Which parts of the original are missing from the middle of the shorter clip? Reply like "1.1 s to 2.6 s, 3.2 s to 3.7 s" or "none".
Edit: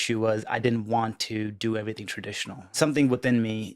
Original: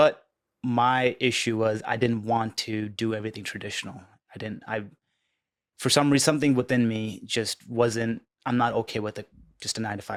4.1 s to 6.2 s